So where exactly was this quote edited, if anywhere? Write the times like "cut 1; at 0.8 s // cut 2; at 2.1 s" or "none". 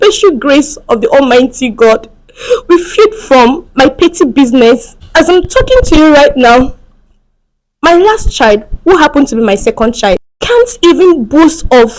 cut 1; at 5.0 s // cut 2; at 10.3 s